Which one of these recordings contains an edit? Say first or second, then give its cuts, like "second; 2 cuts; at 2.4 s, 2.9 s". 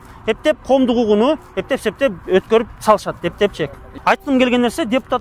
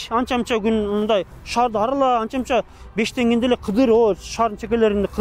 first; 1 cut; at 3.9 s